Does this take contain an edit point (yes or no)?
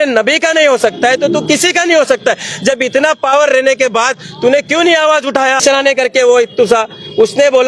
yes